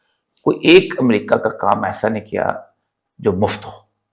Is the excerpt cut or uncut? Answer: uncut